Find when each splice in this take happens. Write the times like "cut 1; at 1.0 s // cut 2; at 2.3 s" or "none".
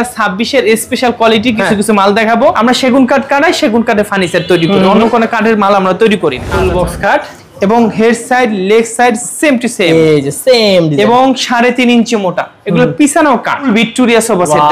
cut 1; at 2.5 s // cut 2; at 4.1 s // cut 3; at 6.4 s // cut 4; at 12.5 s // cut 5; at 13.7 s